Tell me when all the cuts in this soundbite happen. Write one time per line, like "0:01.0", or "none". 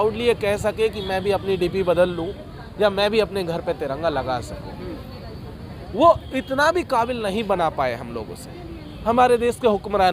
none